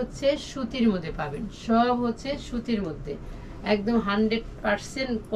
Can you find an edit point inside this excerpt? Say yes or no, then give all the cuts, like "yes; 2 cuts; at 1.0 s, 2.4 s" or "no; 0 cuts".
no; 0 cuts